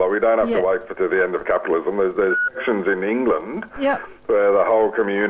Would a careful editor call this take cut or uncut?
uncut